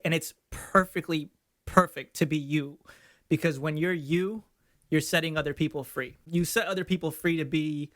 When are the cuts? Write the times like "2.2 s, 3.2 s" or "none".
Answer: 6.2 s